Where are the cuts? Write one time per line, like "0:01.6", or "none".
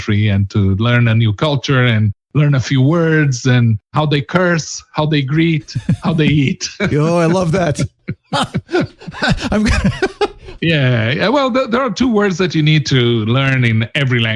0:10.5